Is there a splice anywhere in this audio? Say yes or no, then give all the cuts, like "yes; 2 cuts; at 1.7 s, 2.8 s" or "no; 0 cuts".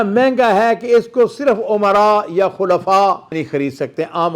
yes; 1 cut; at 3.4 s